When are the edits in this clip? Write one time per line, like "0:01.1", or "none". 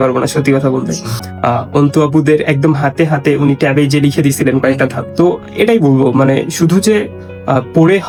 none